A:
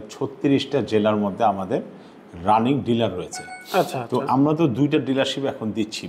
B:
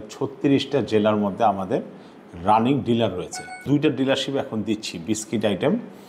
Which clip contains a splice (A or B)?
B